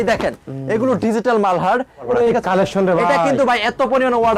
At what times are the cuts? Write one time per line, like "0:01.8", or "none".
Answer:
0:02.0